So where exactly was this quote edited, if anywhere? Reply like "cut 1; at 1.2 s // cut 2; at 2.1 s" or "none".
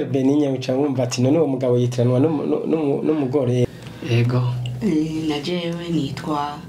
cut 1; at 3.6 s